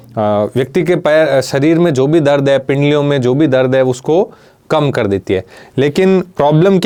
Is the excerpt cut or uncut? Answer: uncut